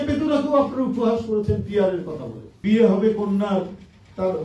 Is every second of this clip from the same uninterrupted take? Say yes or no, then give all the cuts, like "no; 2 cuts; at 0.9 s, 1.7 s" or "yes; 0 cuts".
no; 1 cut; at 2.5 s